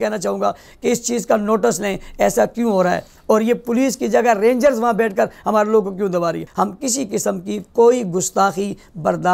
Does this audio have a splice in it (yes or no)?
yes